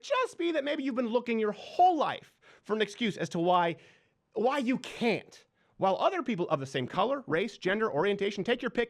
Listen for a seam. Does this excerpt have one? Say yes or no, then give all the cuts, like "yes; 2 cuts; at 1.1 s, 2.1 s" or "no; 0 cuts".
no; 0 cuts